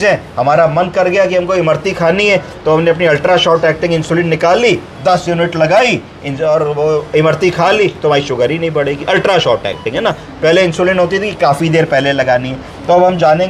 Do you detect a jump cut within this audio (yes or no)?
no